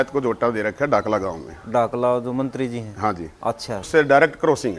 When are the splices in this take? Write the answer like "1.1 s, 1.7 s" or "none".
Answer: 3.9 s

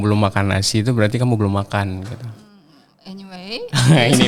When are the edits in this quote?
none

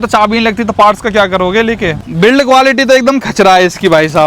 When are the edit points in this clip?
2.0 s

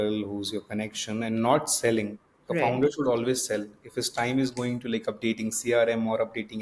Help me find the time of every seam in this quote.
none

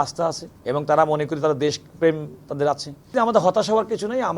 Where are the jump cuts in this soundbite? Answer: 3.1 s

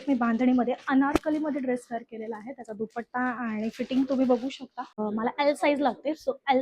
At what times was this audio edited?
4.9 s

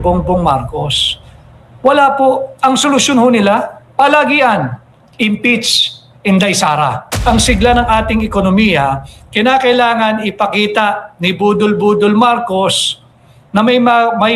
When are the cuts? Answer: 7.1 s

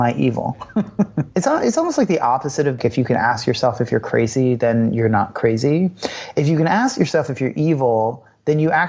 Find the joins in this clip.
1.2 s, 2.8 s

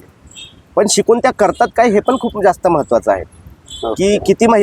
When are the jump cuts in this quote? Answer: none

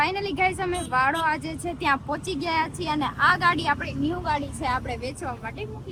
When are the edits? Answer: none

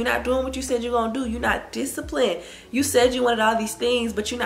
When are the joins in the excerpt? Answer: none

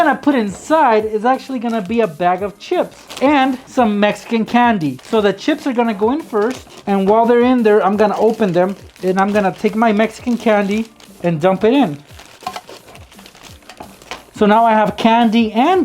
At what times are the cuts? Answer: 3.6 s, 5.0 s, 6.7 s, 8.9 s

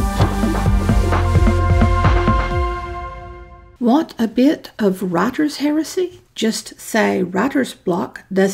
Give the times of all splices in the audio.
5.8 s

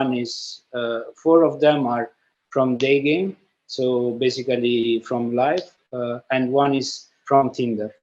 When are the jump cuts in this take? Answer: none

